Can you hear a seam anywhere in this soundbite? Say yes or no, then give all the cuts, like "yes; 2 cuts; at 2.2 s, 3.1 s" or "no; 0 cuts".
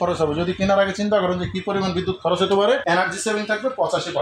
no; 0 cuts